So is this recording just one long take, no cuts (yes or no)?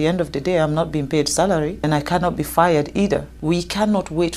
no